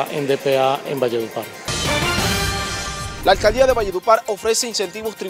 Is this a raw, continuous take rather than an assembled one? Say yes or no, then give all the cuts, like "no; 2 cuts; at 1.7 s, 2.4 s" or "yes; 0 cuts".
no; 1 cut; at 1.7 s